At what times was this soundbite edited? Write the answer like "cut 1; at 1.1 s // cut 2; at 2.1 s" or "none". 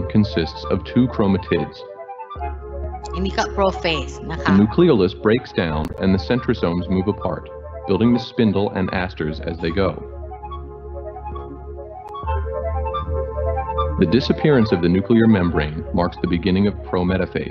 none